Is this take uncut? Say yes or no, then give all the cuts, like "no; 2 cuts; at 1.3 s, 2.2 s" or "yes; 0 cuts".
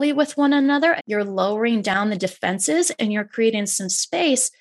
no; 1 cut; at 1.0 s